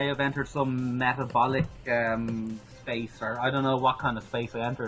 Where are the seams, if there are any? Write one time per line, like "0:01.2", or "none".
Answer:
none